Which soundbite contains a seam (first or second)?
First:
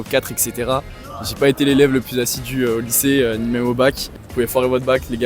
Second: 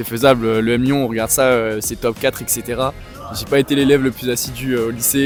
first